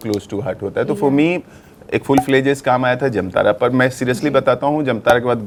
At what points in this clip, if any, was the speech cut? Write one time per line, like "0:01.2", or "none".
none